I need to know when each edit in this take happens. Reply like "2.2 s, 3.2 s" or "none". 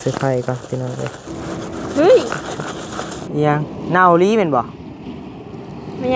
1.3 s